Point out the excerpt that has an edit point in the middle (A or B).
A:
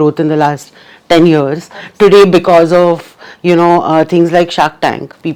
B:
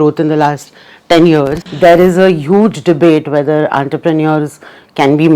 B